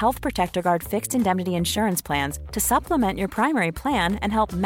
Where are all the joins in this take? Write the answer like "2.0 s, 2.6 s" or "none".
none